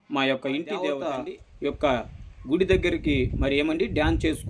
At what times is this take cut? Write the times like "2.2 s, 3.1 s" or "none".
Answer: 1.0 s